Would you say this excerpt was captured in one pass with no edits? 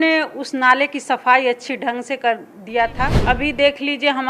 no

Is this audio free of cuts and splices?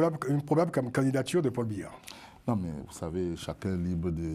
yes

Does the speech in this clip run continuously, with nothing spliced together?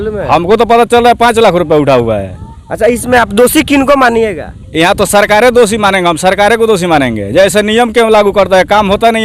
yes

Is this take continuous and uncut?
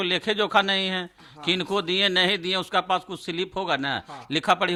yes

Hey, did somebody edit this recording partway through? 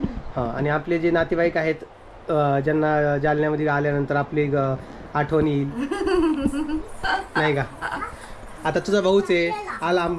no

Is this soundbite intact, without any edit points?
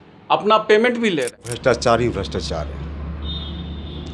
no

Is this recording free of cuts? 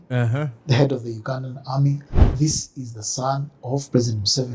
no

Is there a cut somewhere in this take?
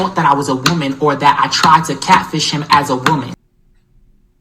yes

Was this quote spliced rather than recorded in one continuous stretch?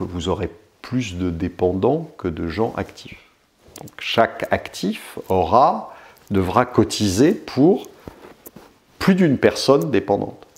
no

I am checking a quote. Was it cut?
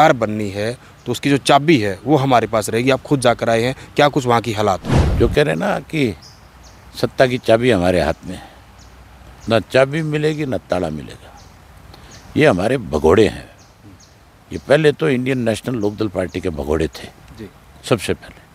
yes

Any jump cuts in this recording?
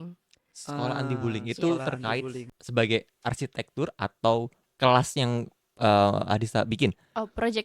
yes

